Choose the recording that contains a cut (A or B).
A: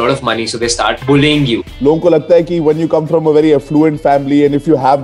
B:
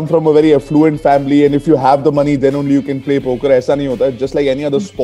A